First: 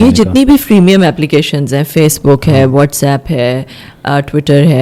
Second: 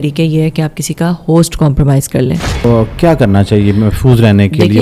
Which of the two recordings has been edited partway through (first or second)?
second